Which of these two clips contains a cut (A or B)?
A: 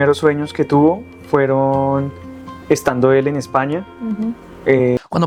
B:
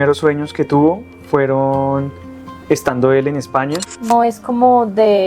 B